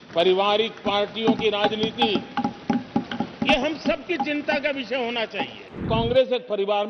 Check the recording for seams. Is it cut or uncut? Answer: cut